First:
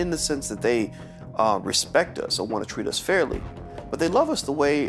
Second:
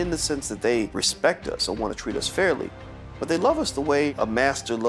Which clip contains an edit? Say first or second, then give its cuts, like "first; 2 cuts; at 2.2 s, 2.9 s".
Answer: second; 2 cuts; at 1.0 s, 4.1 s